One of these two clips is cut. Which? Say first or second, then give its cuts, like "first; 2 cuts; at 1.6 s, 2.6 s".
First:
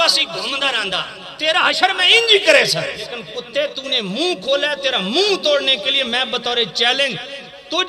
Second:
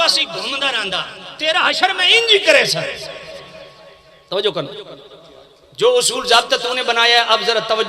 first; 1 cut; at 3.3 s